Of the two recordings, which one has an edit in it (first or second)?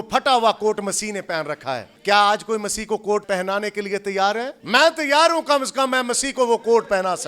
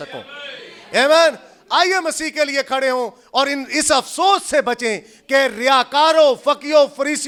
first